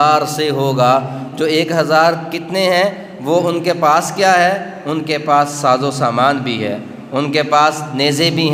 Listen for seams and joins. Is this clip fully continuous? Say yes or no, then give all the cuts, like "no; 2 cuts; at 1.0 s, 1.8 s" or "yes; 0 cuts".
yes; 0 cuts